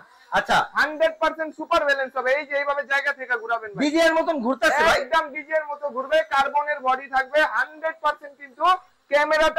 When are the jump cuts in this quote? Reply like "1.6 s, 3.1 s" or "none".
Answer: none